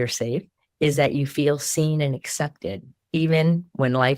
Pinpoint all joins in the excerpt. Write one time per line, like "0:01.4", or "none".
0:02.9